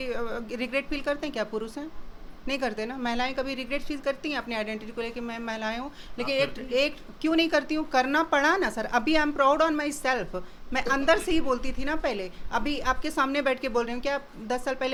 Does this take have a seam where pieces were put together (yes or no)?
no